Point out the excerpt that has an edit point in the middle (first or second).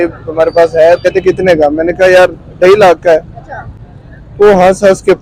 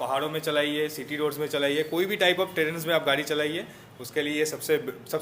first